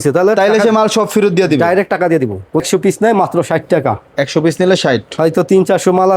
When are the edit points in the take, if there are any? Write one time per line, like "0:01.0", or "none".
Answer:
0:02.6